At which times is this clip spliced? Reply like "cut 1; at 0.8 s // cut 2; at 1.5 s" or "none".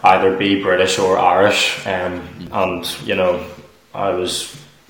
cut 1; at 2.4 s